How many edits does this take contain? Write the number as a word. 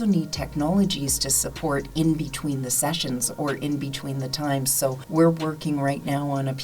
one